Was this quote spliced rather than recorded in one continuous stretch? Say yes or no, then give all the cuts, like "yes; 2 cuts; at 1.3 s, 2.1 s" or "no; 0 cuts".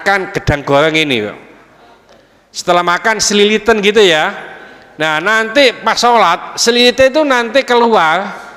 no; 0 cuts